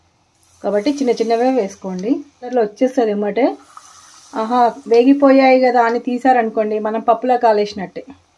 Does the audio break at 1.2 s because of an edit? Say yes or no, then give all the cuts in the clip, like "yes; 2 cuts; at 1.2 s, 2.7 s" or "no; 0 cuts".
no; 1 cut; at 2.5 s